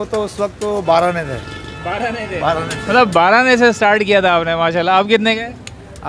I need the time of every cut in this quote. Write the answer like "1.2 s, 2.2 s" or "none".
none